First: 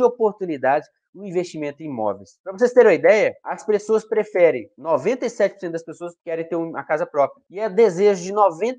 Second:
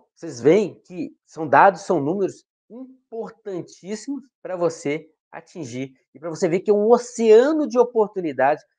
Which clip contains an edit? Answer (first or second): first